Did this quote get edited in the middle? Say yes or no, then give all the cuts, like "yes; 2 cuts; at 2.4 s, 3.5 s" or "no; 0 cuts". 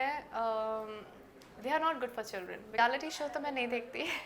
yes; 1 cut; at 2.6 s